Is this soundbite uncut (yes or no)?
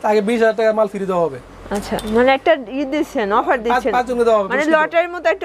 yes